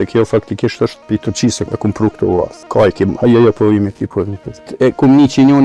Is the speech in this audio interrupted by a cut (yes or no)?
yes